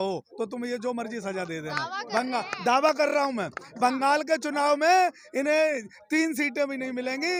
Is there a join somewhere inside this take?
no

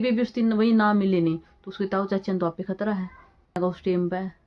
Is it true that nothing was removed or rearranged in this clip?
no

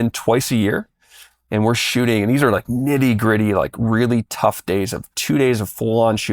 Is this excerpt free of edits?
yes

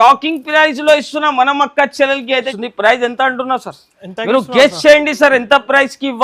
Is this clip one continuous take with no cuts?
no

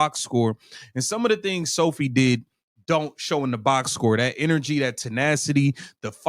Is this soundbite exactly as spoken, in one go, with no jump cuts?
yes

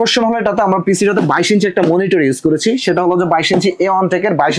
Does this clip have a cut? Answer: no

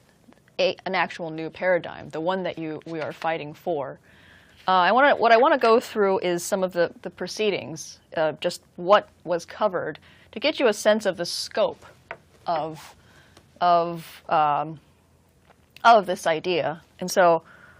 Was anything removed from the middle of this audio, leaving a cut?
no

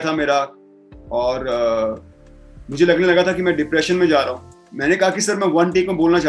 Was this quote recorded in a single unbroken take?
no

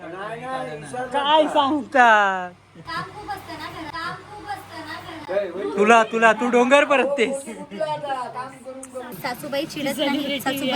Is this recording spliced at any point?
yes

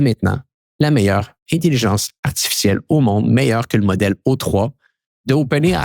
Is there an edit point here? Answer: no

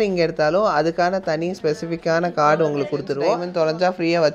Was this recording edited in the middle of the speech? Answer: yes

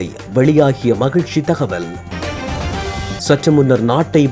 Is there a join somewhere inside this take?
no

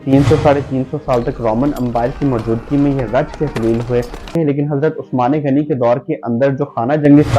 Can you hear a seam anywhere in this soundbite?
yes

